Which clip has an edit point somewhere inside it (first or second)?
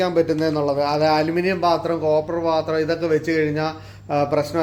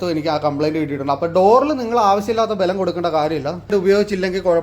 second